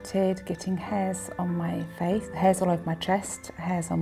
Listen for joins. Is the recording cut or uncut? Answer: cut